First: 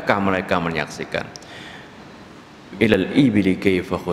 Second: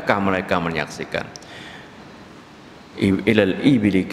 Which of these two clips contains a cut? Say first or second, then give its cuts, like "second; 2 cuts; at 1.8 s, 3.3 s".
first; 1 cut; at 2.9 s